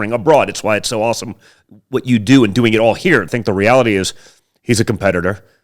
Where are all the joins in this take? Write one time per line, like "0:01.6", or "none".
0:03.3